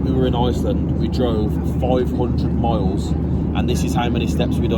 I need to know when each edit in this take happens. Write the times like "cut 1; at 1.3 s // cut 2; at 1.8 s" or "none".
none